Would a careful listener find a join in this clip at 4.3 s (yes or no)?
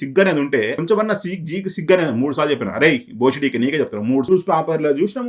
yes